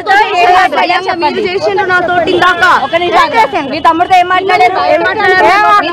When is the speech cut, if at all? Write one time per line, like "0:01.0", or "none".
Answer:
0:02.3